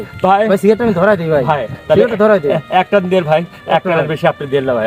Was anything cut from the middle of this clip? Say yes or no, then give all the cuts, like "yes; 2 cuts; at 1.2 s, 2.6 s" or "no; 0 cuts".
no; 0 cuts